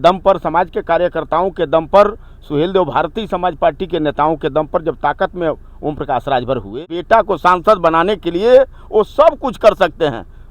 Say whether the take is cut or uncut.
cut